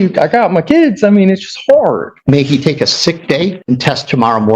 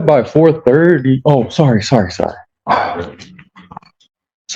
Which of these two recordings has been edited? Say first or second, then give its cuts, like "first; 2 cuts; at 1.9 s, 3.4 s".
first; 2 cuts; at 2.1 s, 3.6 s